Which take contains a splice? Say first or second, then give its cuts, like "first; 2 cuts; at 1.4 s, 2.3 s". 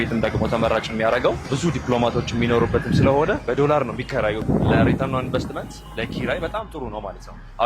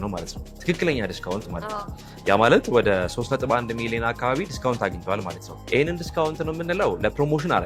first; 3 cuts; at 1.5 s, 3.4 s, 4.4 s